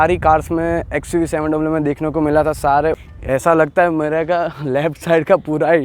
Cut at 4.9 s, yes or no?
no